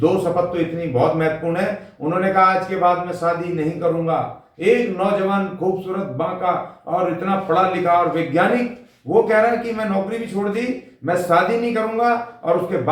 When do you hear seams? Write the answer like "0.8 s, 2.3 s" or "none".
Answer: none

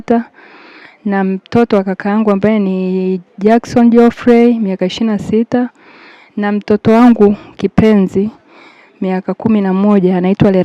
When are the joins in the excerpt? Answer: none

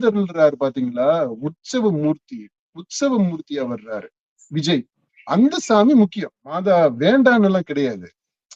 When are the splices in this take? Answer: 6.4 s

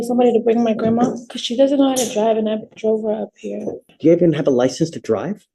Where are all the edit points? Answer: 1.3 s, 3.9 s

